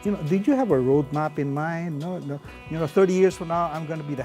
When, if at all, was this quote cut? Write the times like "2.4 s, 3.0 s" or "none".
none